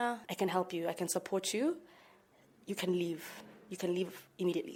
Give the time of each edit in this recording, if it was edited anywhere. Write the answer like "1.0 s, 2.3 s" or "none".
none